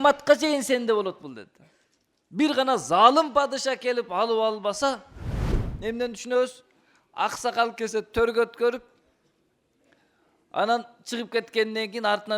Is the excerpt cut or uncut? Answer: cut